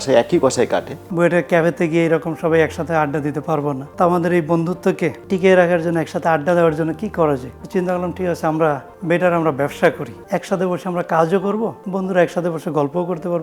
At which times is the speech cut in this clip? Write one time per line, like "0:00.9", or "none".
0:01.0
0:03.9
0:05.2
0:07.6
0:08.9
0:10.1
0:11.8